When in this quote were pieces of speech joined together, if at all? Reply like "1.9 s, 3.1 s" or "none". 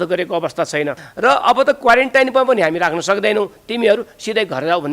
1.0 s

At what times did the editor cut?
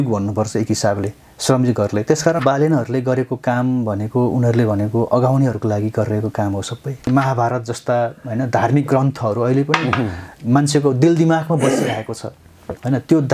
2.4 s, 7.0 s

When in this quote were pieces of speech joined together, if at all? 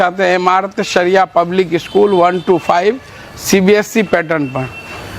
none

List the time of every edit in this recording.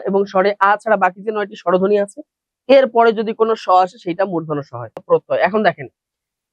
5.0 s

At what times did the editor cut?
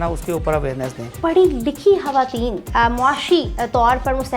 1.2 s, 2.6 s

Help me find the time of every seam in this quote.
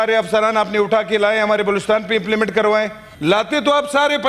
3.0 s

